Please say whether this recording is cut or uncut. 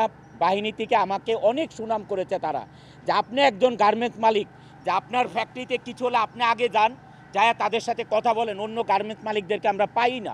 uncut